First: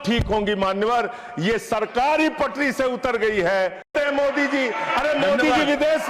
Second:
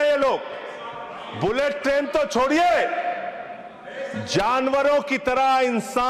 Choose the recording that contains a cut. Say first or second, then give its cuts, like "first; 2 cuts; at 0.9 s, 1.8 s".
first; 1 cut; at 3.9 s